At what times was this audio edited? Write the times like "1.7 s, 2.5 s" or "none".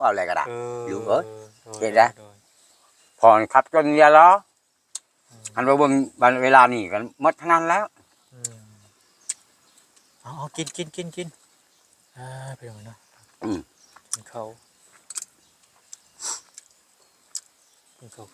none